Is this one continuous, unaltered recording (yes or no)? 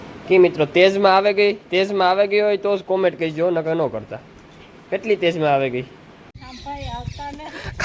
no